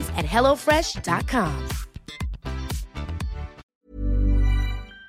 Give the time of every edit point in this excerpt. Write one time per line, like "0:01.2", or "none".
0:03.6